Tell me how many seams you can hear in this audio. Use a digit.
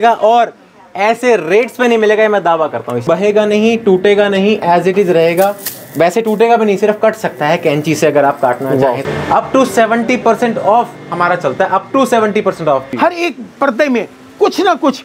3